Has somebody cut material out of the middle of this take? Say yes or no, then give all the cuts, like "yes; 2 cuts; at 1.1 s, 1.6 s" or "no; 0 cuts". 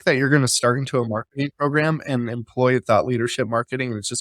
no; 0 cuts